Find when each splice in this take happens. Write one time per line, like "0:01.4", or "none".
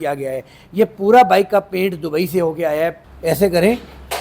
0:03.0